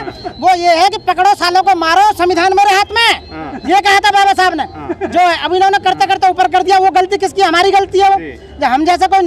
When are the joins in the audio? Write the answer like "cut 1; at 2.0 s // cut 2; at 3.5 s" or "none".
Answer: none